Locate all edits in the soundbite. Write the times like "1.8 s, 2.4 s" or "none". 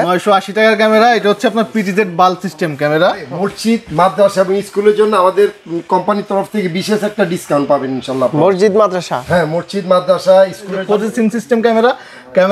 3.2 s, 10.8 s